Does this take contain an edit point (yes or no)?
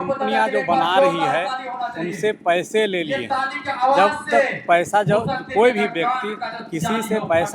no